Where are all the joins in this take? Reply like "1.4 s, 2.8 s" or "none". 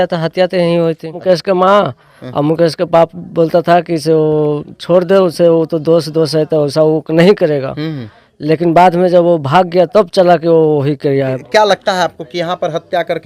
1.2 s, 11.4 s